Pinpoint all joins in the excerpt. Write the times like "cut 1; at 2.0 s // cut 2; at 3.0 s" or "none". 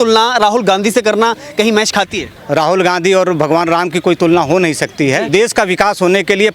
cut 1; at 2.3 s // cut 2; at 5.3 s